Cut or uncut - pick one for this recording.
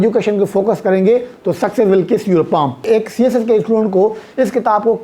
cut